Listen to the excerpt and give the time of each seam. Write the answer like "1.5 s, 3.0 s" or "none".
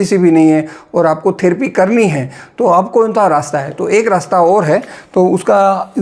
none